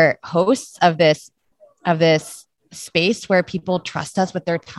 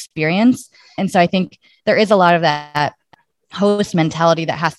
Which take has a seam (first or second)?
second